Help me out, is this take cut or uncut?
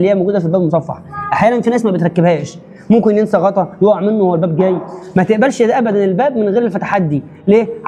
uncut